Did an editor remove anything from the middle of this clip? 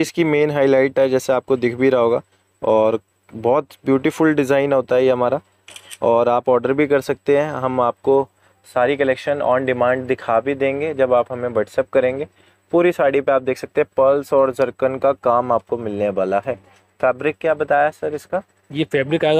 no; 0 cuts

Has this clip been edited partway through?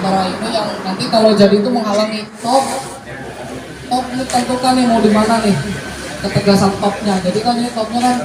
yes; 1 cut; at 2.4 s

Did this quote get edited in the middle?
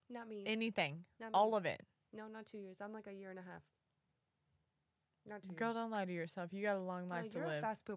no; 0 cuts

